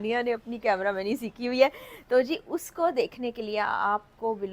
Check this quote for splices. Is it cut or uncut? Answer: uncut